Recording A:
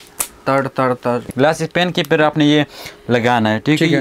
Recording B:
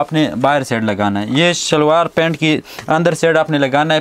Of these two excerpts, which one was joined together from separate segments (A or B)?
A